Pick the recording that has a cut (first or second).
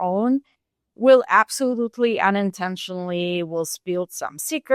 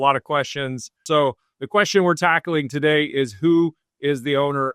second